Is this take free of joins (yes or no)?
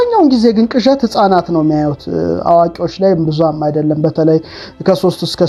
yes